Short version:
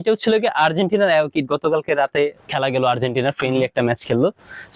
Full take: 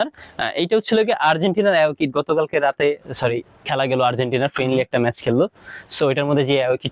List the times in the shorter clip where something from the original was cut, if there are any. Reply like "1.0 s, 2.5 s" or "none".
2.4 s